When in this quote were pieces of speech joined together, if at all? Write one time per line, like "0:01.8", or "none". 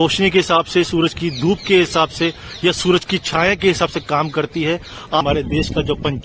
0:05.2